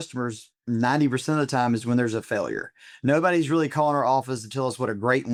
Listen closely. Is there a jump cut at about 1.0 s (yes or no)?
no